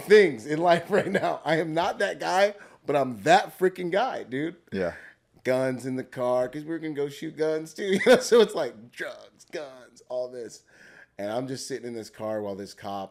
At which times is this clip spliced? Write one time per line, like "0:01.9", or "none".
none